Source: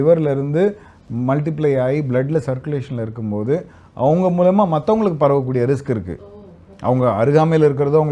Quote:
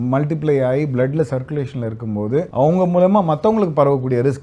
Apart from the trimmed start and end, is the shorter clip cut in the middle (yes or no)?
yes